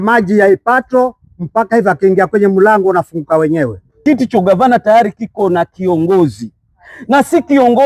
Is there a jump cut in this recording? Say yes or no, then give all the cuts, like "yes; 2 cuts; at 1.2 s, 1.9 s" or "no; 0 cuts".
yes; 1 cut; at 3.8 s